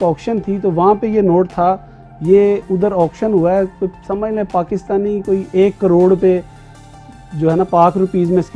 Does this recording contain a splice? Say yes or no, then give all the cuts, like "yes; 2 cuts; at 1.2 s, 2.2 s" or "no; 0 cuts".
no; 0 cuts